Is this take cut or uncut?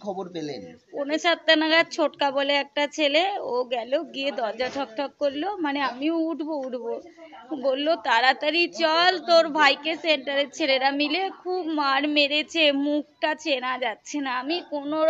uncut